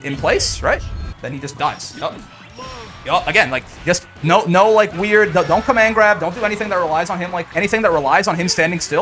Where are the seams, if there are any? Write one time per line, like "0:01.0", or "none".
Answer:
0:01.9
0:07.5